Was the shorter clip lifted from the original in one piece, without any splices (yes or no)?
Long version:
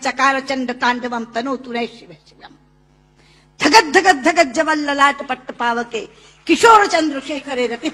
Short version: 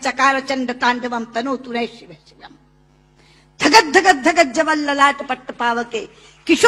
yes